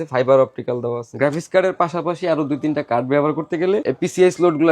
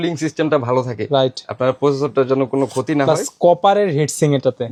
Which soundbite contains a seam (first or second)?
first